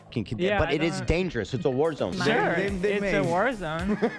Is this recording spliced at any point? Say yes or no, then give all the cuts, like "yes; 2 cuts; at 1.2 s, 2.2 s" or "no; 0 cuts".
yes; 1 cut; at 2.1 s